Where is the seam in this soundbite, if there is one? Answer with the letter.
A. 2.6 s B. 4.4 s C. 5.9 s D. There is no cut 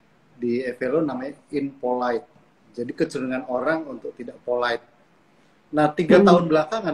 D